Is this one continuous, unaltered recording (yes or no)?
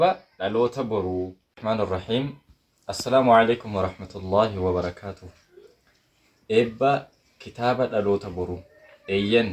no